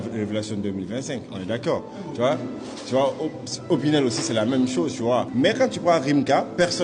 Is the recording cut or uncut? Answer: cut